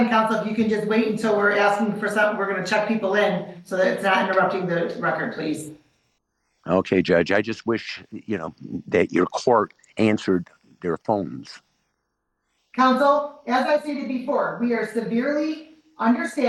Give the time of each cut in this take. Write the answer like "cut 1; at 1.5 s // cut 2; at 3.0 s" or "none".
none